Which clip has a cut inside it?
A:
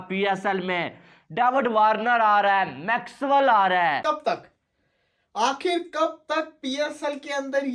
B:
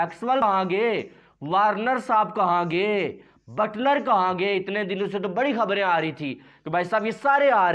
A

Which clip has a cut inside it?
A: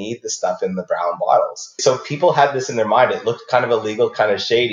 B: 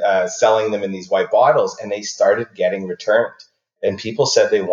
A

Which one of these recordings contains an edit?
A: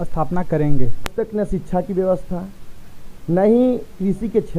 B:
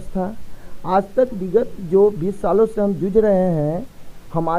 A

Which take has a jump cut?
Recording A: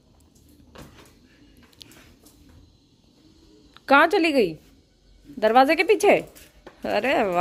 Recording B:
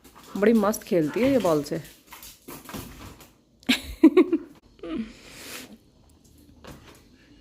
B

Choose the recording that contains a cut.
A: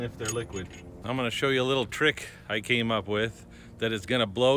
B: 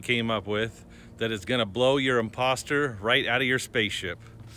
A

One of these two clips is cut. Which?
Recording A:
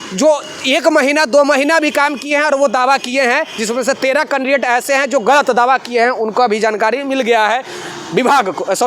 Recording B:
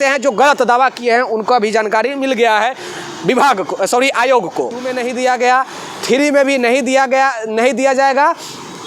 B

